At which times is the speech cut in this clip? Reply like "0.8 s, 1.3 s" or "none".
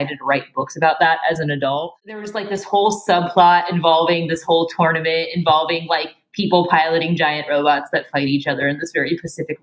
2.2 s